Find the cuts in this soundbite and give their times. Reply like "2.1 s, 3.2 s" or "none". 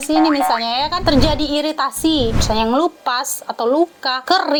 none